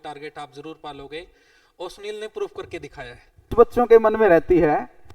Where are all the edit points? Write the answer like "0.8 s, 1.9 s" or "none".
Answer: 3.5 s